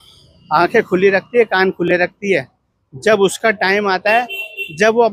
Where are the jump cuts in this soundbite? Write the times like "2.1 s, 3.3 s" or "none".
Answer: none